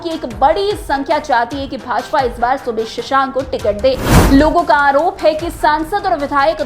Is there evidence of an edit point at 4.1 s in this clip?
yes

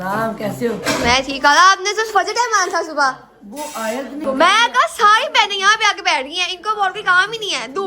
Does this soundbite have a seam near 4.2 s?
yes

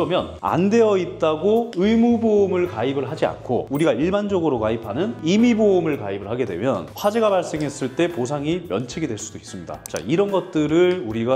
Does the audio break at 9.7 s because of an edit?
yes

